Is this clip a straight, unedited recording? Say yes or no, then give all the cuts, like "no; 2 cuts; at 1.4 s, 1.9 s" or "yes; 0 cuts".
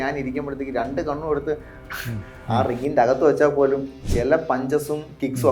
yes; 0 cuts